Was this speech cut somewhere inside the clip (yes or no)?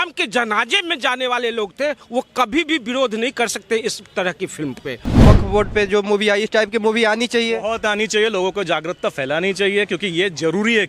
yes